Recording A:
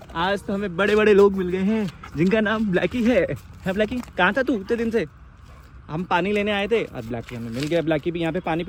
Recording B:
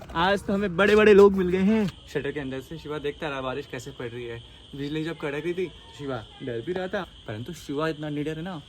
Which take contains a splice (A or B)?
B